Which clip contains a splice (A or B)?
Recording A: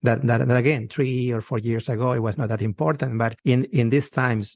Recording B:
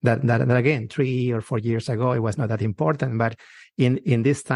A